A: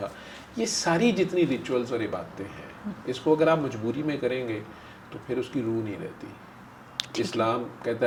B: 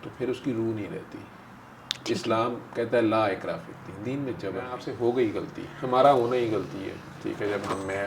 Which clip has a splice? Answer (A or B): B